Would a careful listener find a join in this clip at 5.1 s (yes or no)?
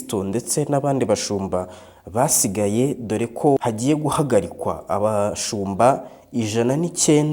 no